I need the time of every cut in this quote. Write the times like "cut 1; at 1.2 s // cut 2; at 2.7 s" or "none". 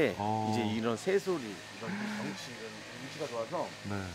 none